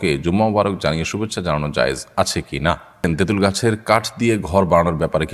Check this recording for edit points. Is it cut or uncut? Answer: cut